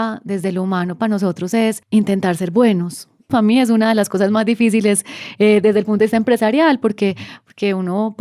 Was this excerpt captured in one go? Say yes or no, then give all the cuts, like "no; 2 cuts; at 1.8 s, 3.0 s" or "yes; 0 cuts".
no; 2 cuts; at 1.8 s, 3.3 s